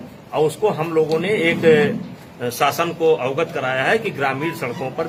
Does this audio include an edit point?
no; 0 cuts

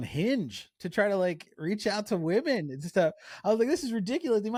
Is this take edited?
no; 0 cuts

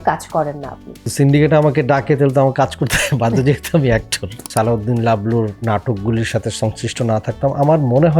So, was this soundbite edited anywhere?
yes; 2 cuts; at 1.1 s, 4.4 s

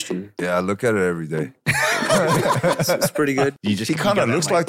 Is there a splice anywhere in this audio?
yes; 1 cut; at 3.5 s

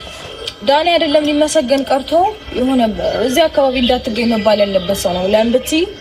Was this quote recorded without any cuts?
yes; 0 cuts

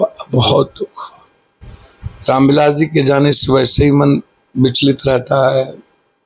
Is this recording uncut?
yes; 0 cuts

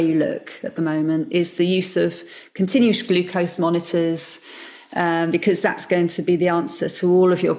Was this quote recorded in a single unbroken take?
yes; 0 cuts

